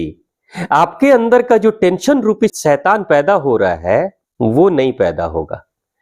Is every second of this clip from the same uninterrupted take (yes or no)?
no